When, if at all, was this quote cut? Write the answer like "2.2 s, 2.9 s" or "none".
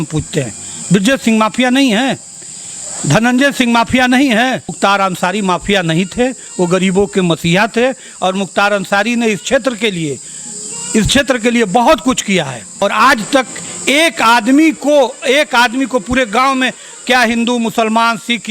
4.8 s, 12.8 s